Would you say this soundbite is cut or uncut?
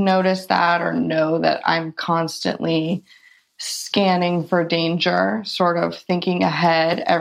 uncut